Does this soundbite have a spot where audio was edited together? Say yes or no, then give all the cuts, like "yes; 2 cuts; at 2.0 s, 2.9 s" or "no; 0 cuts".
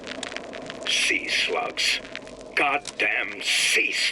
yes; 1 cut; at 1.0 s